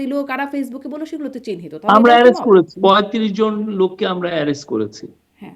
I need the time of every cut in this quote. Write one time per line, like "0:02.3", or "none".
0:02.7